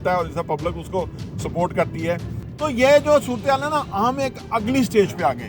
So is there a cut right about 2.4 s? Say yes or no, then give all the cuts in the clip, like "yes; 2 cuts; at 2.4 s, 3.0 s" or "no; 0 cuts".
yes; 1 cut; at 2.4 s